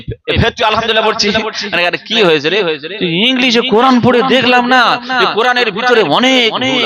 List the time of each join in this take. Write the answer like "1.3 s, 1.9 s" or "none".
none